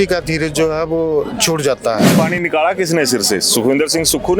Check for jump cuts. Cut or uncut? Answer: cut